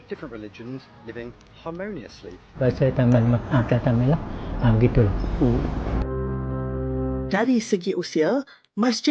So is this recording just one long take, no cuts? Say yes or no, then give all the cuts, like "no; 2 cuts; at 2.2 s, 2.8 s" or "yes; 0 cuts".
no; 1 cut; at 2.6 s